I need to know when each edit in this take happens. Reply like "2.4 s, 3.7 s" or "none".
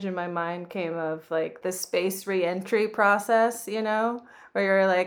1.6 s